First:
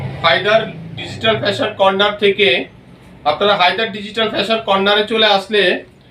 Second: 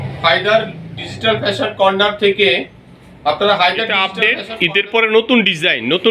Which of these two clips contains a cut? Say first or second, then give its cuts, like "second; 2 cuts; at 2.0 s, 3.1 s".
second; 1 cut; at 3.9 s